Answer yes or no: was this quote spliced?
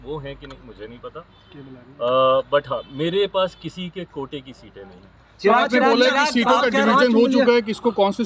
no